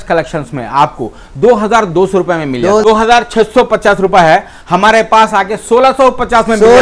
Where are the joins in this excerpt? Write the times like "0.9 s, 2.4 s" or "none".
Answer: 2.8 s